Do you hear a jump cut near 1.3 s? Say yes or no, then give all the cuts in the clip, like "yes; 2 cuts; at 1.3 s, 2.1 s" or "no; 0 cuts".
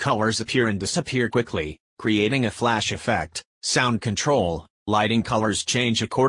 no; 2 cuts; at 3.8 s, 4.7 s